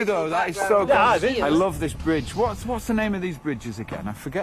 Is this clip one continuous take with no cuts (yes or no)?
no